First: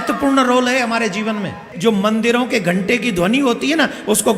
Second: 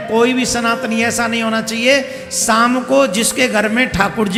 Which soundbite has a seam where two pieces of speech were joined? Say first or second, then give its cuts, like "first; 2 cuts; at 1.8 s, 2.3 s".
first; 1 cut; at 1.7 s